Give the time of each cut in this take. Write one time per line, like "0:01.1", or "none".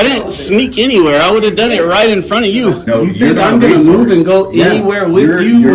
0:02.8